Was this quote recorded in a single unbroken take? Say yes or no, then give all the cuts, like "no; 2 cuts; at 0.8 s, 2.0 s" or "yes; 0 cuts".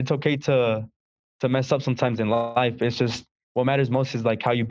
yes; 0 cuts